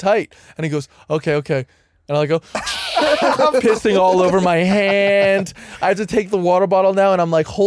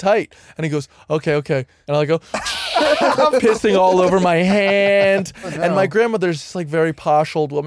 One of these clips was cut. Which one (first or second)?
second